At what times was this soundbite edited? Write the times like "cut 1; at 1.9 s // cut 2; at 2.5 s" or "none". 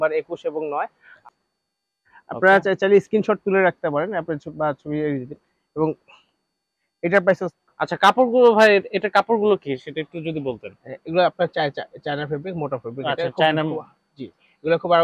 cut 1; at 1.1 s // cut 2; at 7.5 s